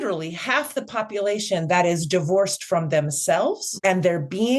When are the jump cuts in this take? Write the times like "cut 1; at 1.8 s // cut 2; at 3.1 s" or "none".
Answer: cut 1; at 3.7 s